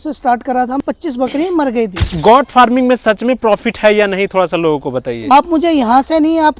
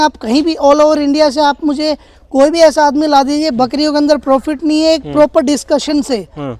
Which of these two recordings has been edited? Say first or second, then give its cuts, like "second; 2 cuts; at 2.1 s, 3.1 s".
first; 3 cuts; at 0.8 s, 2.2 s, 5.2 s